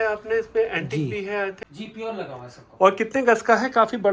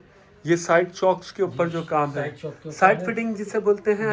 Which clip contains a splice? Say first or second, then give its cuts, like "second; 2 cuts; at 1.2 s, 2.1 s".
first; 1 cut; at 1.6 s